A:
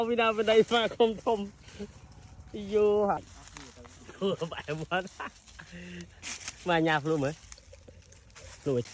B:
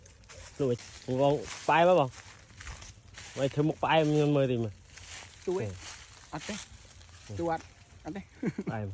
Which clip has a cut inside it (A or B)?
A